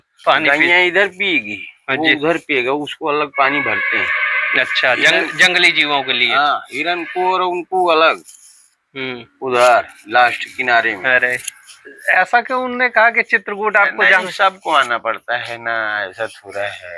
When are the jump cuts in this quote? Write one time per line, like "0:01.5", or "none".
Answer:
0:11.5